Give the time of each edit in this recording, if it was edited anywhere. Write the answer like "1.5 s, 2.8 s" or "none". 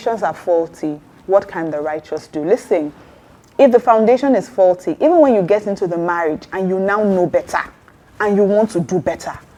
none